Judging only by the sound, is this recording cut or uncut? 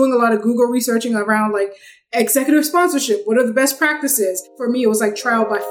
cut